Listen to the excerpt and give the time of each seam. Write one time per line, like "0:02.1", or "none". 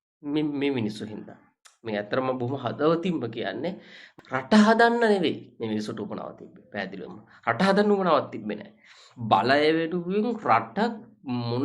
0:04.1